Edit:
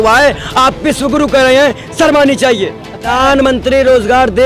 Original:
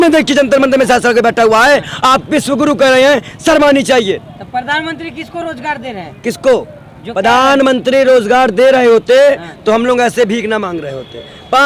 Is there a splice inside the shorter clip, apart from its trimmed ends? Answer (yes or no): yes